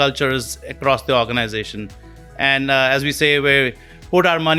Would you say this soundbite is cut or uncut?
uncut